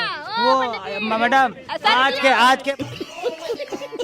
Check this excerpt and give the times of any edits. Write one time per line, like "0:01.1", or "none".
0:02.7

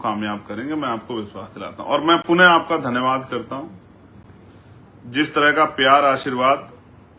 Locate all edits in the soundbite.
none

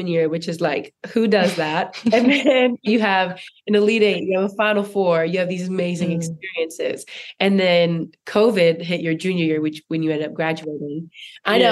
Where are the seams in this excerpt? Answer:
0:01.8

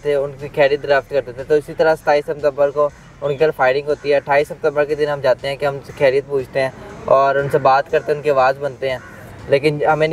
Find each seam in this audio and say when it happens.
none

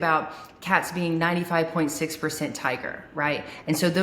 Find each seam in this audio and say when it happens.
none

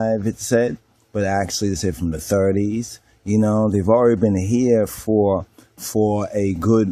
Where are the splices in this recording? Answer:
0:03.6

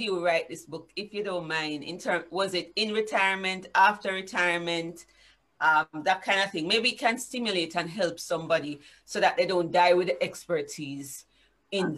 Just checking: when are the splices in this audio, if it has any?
none

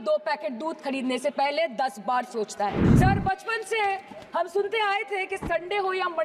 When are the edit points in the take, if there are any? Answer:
0:02.8

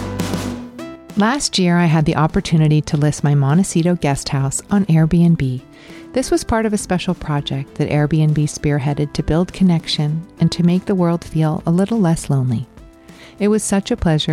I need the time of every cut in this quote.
0:01.0

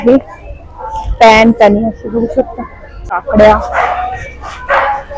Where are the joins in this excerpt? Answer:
0:03.2

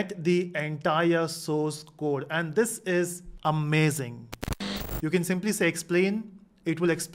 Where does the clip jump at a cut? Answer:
0:04.6

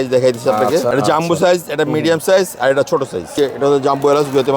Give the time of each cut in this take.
0:00.9
0:03.3

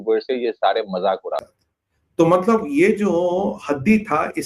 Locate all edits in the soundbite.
0:01.4

